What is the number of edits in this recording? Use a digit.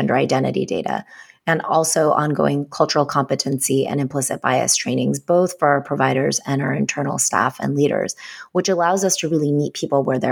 0